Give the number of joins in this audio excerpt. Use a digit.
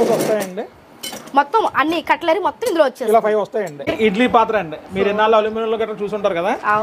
1